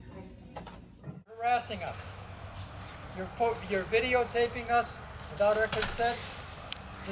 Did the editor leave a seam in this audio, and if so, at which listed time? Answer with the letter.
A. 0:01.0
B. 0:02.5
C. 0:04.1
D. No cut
A